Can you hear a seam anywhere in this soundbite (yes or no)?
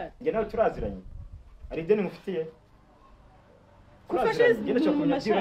no